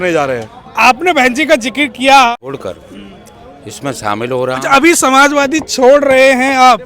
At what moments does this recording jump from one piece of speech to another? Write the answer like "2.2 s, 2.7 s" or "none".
2.3 s